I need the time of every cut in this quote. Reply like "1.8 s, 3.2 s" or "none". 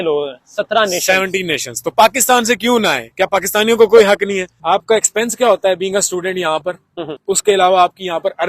4.5 s, 7.1 s

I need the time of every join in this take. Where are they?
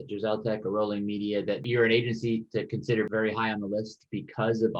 3.1 s

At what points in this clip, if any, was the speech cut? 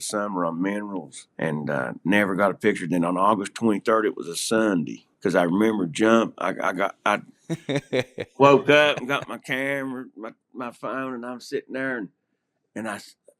1.2 s, 5.0 s

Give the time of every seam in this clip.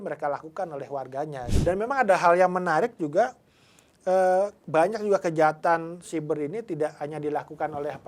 1.4 s

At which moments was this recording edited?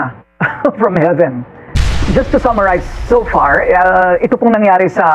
2.0 s

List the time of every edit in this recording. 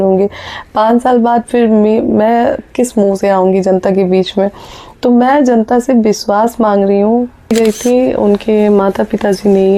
7.5 s

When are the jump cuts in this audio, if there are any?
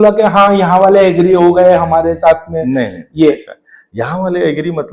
none

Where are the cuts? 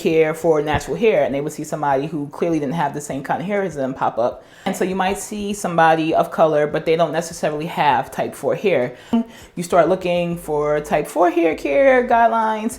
4.7 s, 9.1 s

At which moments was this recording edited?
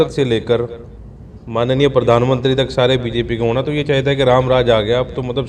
none

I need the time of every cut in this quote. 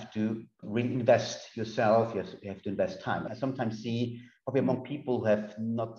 3.3 s

